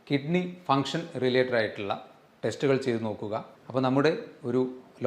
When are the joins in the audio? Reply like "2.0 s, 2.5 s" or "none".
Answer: 3.6 s